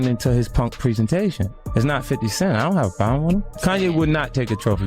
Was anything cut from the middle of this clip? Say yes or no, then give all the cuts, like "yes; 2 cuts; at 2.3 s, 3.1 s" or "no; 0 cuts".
yes; 2 cuts; at 1.5 s, 3.5 s